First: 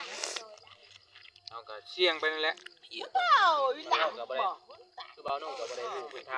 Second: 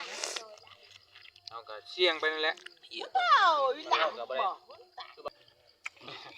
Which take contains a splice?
second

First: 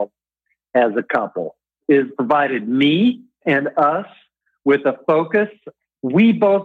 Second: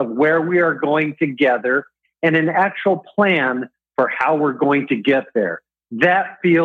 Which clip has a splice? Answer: first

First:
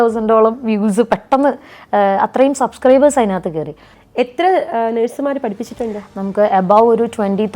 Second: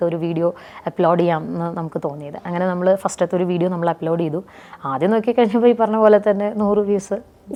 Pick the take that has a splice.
first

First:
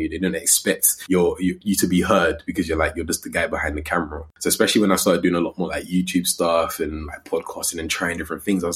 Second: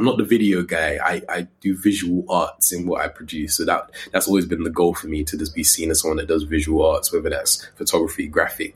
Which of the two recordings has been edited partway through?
first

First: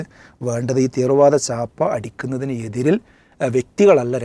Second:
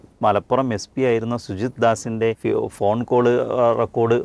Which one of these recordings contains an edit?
second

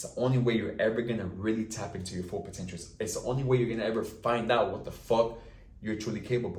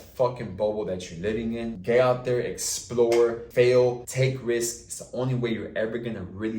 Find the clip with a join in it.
second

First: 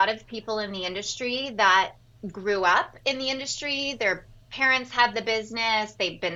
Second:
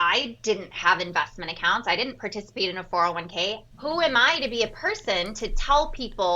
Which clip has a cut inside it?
second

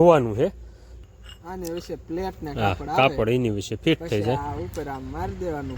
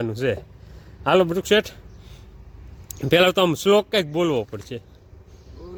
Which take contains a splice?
first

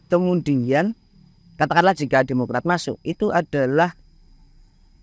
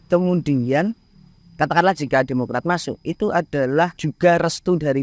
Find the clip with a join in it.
second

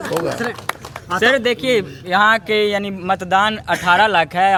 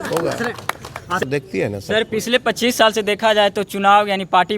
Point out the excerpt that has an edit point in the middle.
second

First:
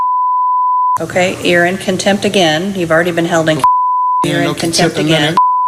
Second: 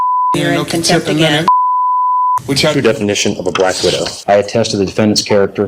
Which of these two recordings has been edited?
second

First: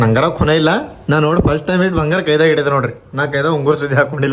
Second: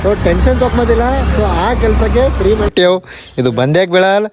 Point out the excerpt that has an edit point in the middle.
second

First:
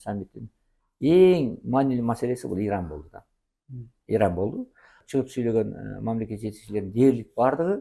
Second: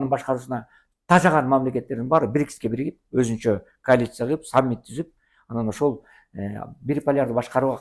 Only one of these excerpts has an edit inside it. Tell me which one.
first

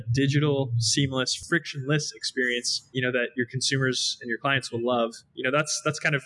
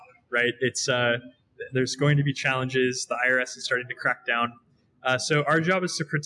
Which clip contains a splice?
first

